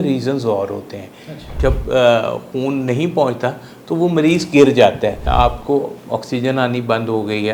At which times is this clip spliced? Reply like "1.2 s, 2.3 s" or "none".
1.4 s, 5.2 s